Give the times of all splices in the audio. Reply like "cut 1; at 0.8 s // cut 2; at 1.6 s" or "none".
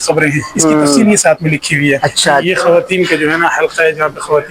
cut 1; at 2.4 s